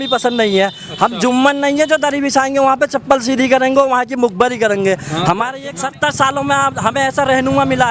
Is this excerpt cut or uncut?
cut